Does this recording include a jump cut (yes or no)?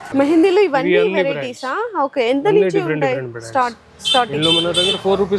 no